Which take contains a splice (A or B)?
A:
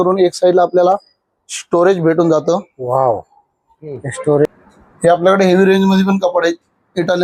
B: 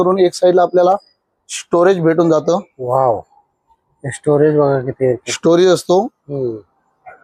A